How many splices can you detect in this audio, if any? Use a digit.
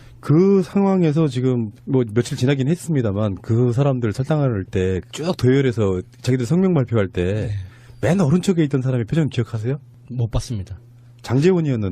1